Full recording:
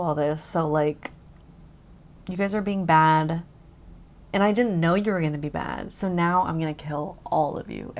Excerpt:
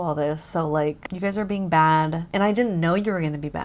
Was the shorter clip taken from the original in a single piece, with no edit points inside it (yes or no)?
no